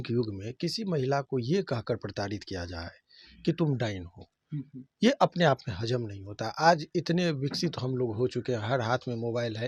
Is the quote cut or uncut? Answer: uncut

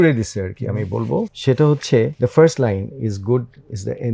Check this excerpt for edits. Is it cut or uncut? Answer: cut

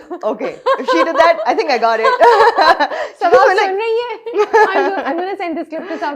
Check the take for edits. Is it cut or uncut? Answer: uncut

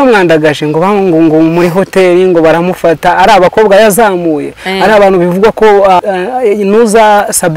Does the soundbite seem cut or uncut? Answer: cut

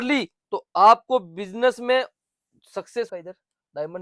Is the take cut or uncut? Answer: cut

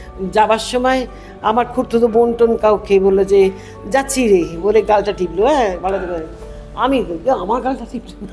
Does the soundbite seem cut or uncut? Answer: uncut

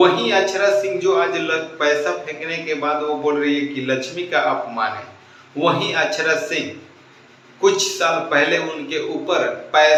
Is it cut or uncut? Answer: uncut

